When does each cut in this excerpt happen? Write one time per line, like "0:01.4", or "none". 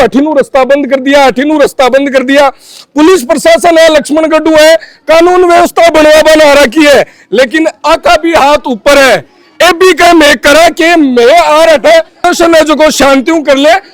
none